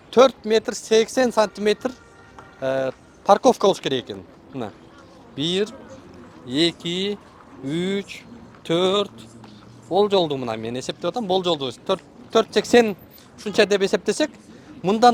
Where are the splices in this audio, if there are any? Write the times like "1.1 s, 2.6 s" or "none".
none